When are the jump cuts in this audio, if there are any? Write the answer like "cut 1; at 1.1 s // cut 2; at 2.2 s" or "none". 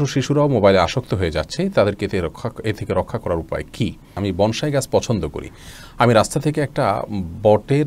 cut 1; at 4.1 s